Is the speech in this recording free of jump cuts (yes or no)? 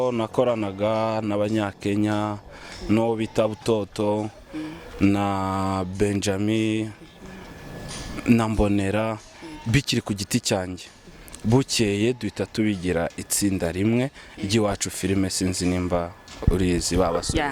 yes